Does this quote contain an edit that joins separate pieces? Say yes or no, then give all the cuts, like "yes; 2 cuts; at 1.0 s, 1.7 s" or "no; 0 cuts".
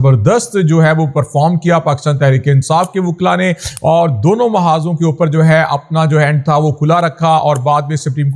no; 0 cuts